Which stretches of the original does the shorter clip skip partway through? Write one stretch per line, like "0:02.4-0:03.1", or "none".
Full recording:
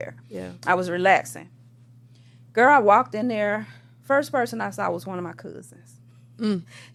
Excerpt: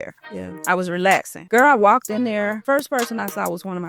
0:01.3-0:02.4
0:03.6-0:04.0